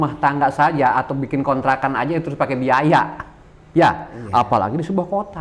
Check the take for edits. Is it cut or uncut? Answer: uncut